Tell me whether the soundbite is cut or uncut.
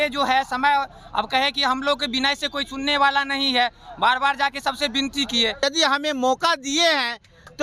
cut